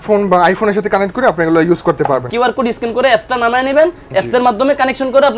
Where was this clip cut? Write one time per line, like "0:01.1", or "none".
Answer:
0:02.3